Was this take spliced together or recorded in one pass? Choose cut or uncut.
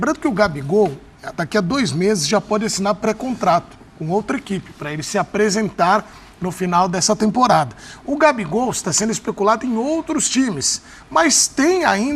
uncut